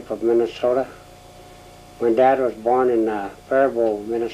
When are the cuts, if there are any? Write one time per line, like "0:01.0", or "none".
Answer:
0:01.4